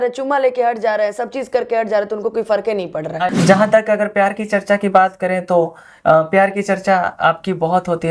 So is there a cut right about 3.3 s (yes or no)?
yes